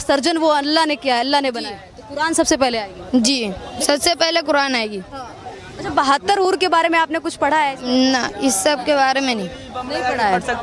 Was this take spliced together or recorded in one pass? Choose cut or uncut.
uncut